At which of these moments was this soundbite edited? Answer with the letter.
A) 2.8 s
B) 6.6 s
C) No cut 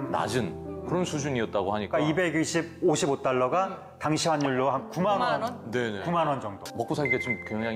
B